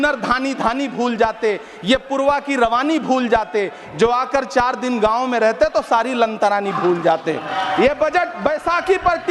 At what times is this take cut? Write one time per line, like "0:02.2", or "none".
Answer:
0:07.5